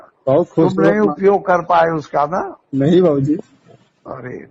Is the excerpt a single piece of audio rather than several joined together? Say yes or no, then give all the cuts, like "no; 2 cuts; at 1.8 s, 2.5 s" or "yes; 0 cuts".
yes; 0 cuts